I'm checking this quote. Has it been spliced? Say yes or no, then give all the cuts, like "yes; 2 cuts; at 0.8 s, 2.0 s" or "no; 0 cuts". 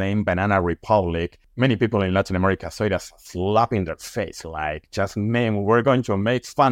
yes; 1 cut; at 1.4 s